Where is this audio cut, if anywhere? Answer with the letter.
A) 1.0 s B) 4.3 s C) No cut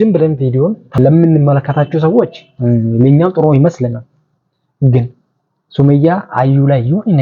A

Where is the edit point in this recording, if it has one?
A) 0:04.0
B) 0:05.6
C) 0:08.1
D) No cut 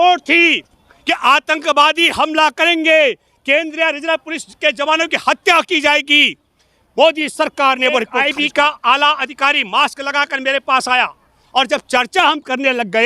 C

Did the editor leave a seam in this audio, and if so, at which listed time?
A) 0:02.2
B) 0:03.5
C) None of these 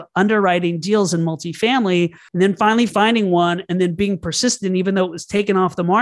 A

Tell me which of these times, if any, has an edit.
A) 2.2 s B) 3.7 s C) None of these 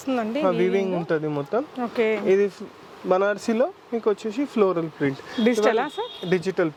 C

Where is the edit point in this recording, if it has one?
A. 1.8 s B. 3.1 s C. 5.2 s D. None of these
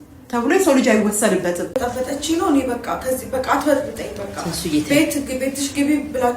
A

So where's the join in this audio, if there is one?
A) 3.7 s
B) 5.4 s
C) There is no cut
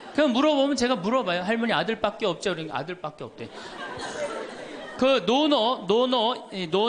A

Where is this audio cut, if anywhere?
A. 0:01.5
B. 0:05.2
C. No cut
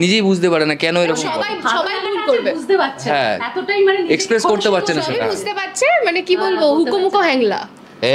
C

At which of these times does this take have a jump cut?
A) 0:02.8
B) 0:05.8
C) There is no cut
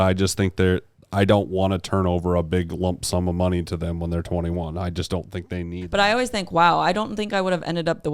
B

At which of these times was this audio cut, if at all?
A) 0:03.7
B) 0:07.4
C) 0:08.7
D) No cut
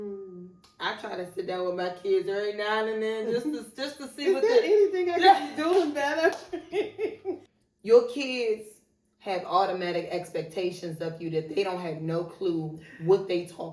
B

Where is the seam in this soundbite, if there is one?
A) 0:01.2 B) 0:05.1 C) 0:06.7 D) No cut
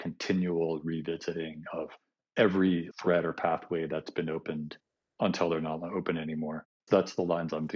C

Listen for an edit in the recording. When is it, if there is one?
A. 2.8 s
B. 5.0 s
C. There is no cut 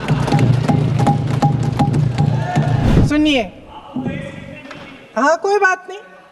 A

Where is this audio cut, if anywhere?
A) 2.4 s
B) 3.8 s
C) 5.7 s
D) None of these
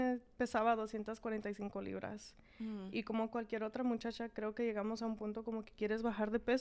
D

